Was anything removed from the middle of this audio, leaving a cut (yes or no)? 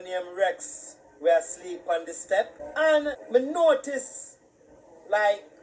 yes